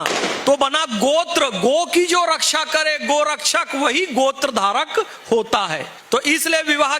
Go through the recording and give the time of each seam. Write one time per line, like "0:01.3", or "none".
none